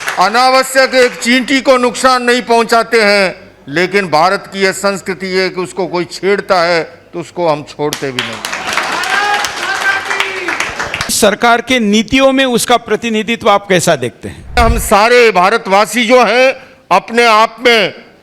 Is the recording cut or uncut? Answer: cut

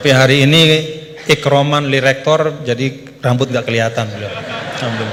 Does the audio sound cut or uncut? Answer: uncut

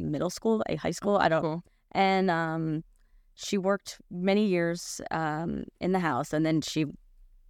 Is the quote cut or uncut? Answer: uncut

